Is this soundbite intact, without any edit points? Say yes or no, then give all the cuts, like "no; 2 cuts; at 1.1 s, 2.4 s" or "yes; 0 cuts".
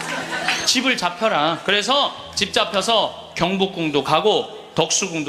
yes; 0 cuts